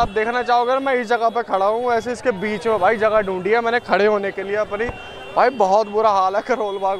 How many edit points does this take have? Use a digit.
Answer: 0